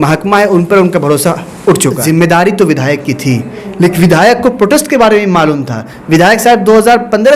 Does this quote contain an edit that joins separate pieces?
yes; 1 cut; at 2.0 s

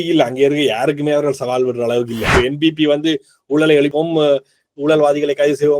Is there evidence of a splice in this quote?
yes; 1 cut; at 2.3 s

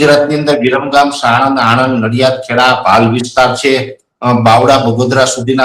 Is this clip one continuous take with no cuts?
yes; 0 cuts

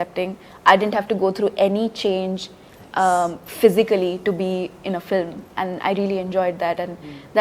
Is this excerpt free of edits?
yes; 0 cuts

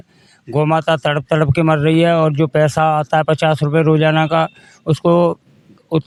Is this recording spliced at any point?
no; 0 cuts

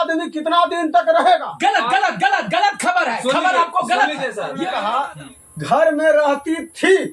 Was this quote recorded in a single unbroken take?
no; 1 cut; at 4.5 s

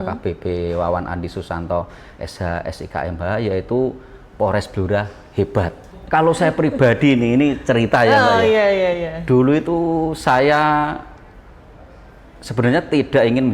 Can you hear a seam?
yes; 1 cut; at 5.9 s

